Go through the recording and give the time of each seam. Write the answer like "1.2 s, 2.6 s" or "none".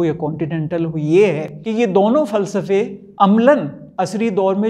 1.5 s, 3.0 s, 3.8 s